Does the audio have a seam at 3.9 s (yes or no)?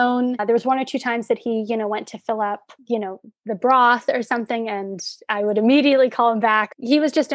no